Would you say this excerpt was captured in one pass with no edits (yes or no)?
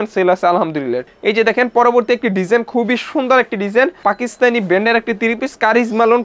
no